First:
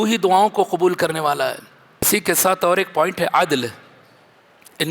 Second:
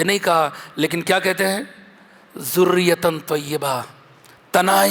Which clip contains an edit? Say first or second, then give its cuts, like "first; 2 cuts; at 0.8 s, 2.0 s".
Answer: first; 1 cut; at 2.1 s